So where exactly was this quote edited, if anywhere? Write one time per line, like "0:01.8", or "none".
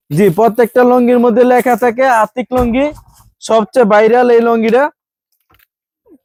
none

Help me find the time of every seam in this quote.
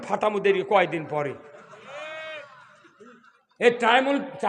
none

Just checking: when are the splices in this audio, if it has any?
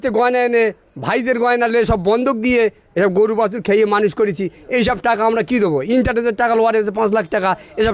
none

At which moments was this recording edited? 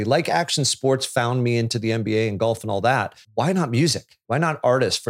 0:03.2
0:04.1

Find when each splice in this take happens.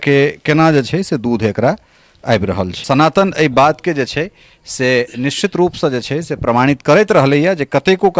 0:02.8

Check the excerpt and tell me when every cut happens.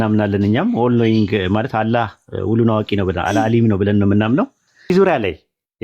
0:04.9

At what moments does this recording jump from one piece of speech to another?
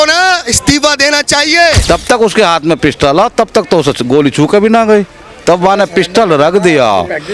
0:01.8

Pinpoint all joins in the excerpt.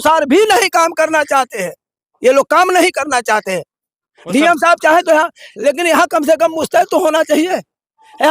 0:05.4

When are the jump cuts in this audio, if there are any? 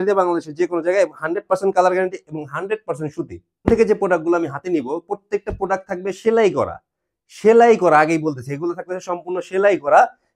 none

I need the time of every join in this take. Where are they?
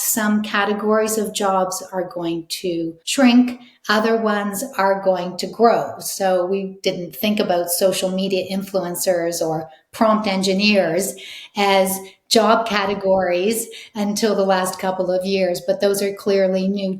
0:03.0

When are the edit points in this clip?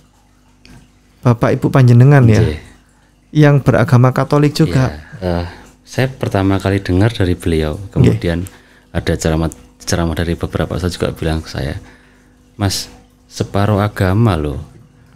0:05.1

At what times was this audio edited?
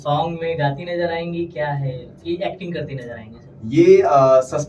none

